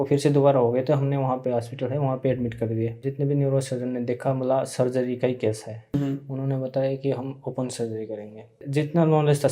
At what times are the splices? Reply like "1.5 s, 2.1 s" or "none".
3.0 s, 6.0 s, 8.6 s